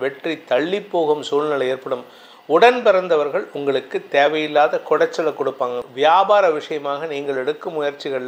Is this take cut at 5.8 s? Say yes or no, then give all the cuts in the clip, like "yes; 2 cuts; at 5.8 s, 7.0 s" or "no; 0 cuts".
yes; 1 cut; at 5.8 s